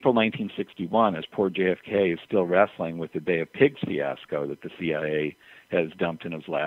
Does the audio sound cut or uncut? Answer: uncut